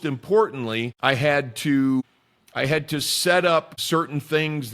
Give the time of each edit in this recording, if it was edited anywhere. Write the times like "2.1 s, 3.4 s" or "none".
0.9 s, 2.0 s, 3.8 s